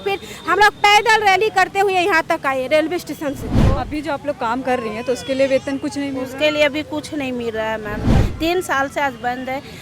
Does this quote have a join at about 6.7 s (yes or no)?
no